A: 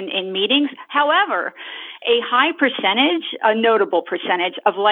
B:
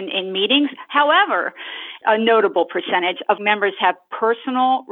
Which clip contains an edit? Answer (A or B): B